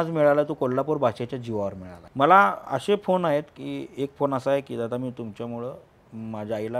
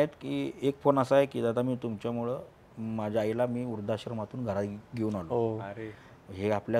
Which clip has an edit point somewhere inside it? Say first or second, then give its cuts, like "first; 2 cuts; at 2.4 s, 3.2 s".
first; 1 cut; at 2.0 s